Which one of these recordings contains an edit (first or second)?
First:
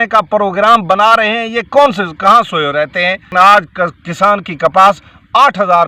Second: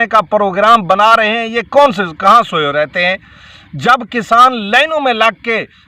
first